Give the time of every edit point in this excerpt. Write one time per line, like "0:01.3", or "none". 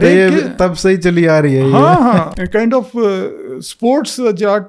0:02.3